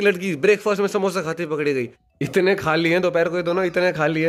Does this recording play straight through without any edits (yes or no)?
no